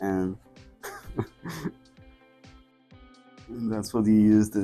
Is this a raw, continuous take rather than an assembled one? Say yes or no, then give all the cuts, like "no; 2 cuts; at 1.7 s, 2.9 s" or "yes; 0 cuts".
yes; 0 cuts